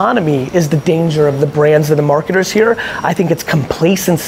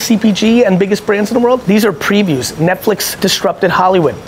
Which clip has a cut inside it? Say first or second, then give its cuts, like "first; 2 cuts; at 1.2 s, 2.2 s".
second; 2 cuts; at 1.6 s, 3.1 s